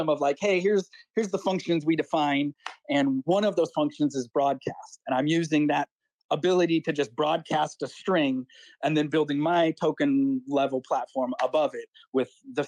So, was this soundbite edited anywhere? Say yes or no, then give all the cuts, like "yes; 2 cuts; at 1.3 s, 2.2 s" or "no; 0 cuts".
no; 0 cuts